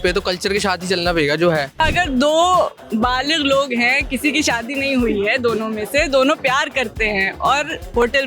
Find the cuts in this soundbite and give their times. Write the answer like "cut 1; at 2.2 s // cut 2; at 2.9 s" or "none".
cut 1; at 1.8 s